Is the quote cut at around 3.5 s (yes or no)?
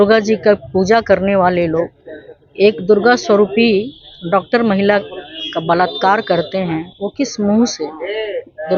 no